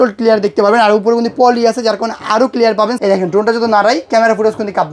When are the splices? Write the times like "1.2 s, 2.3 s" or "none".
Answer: 3.0 s